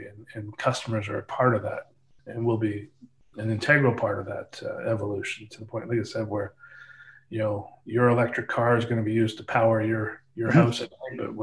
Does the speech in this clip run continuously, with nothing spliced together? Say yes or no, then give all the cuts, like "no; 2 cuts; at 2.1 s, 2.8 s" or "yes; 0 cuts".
yes; 0 cuts